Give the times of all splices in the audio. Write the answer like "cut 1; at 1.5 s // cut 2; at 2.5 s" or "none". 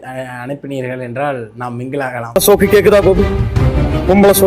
cut 1; at 2.4 s